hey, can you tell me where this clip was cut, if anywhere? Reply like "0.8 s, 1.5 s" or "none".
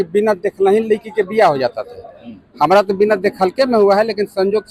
none